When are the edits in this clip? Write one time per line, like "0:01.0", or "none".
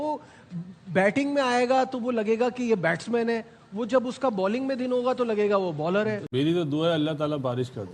0:06.2